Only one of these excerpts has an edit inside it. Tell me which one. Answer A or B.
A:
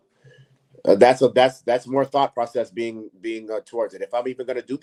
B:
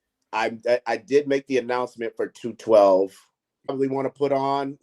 B